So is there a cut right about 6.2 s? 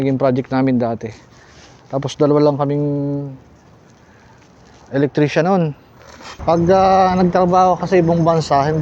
yes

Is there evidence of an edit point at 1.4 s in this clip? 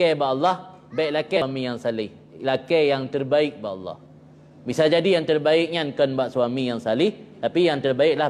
yes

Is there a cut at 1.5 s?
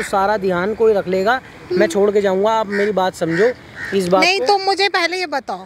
no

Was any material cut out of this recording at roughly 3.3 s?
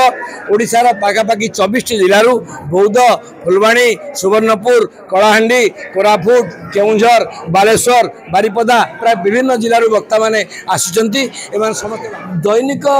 no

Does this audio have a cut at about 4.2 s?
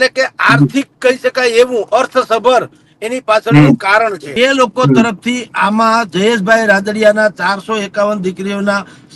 yes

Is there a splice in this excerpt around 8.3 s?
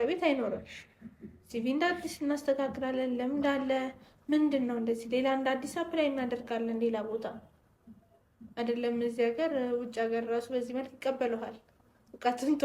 no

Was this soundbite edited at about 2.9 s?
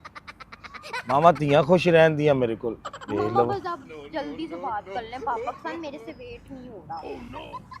yes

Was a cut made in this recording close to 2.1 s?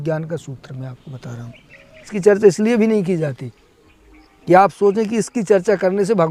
yes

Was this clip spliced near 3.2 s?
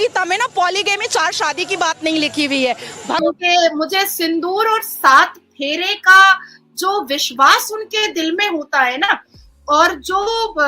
yes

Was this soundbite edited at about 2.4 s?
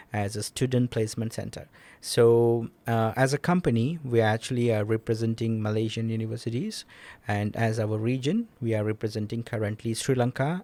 no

